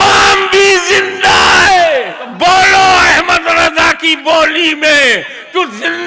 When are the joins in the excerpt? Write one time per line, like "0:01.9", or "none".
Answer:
0:02.2